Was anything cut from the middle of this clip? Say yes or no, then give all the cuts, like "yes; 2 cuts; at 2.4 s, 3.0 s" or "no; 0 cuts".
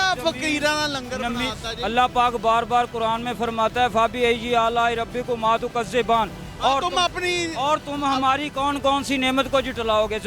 no; 0 cuts